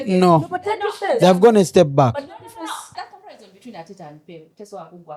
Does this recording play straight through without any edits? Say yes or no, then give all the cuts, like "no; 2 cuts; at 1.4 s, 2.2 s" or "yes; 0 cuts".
no; 1 cut; at 2.9 s